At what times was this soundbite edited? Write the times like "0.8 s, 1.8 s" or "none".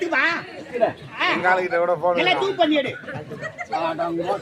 1.2 s

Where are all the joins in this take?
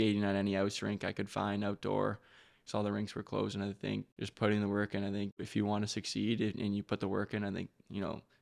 4.2 s, 5.4 s

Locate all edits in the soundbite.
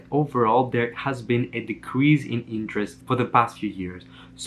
none

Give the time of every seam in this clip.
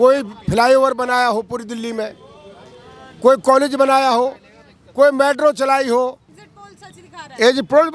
6.3 s

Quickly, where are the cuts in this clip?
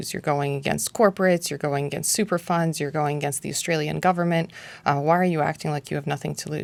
none

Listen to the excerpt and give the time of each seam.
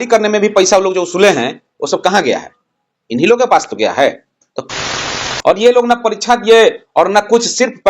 4.7 s

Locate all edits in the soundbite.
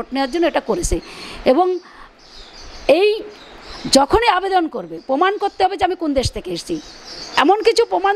none

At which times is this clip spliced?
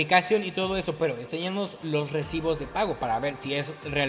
none

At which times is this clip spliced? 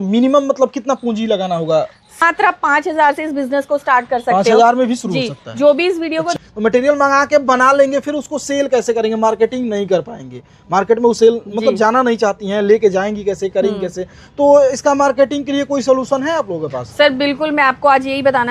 2.2 s, 6.3 s

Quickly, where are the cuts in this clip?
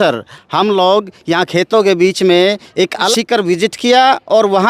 3.1 s

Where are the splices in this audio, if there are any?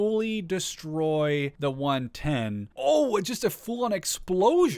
1.5 s, 2.7 s

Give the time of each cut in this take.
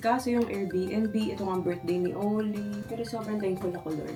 none

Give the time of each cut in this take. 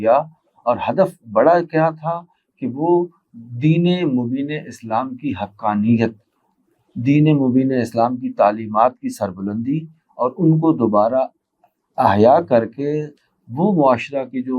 none

